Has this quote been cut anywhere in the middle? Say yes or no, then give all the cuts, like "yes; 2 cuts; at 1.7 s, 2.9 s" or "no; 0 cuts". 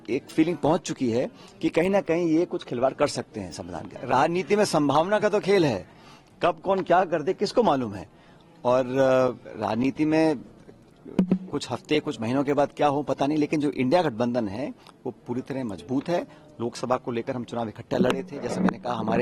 yes; 1 cut; at 4.0 s